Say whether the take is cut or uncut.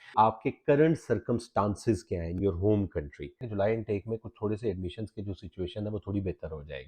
cut